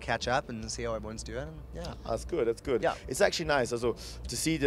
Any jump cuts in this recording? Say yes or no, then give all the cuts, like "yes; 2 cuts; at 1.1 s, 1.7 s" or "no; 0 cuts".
no; 0 cuts